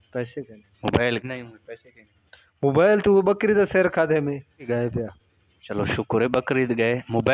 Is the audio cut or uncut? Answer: cut